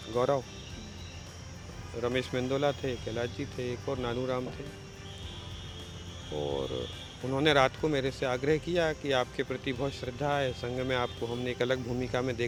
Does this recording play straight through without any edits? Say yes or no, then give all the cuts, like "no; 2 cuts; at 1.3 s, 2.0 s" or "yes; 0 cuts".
yes; 0 cuts